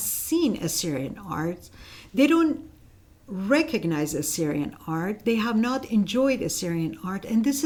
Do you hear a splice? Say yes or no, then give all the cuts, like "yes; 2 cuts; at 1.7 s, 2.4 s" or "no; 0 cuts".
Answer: no; 0 cuts